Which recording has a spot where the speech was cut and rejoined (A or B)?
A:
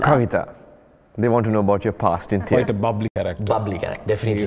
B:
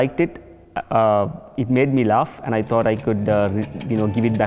A